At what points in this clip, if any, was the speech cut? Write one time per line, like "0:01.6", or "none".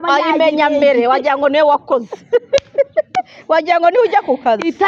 none